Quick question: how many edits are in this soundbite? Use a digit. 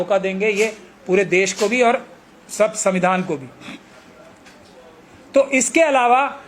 0